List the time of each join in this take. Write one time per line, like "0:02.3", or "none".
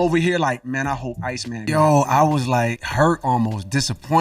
0:01.7